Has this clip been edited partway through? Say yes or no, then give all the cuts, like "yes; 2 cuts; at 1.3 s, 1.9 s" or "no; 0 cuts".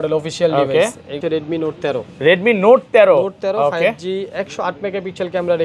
yes; 1 cut; at 1.2 s